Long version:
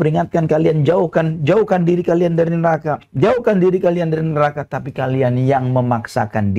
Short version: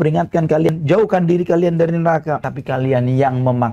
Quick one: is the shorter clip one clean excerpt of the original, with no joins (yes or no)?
no